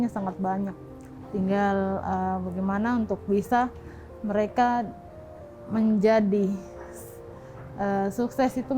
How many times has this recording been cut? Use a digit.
0